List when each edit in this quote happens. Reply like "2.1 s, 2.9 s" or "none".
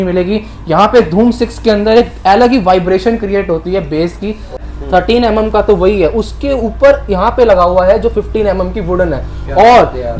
4.6 s